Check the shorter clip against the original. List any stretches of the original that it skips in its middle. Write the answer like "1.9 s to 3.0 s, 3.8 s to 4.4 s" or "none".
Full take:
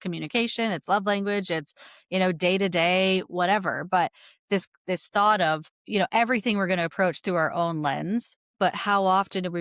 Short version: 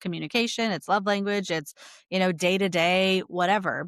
none